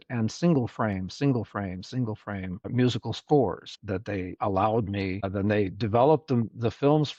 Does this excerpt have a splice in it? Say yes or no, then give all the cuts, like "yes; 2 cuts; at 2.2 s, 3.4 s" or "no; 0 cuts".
yes; 3 cuts; at 2.7 s, 4.0 s, 5.3 s